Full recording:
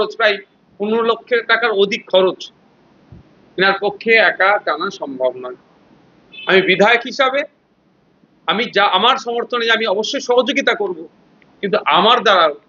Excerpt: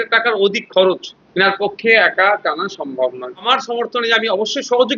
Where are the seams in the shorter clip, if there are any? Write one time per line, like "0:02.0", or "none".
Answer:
0:01.2
0:03.5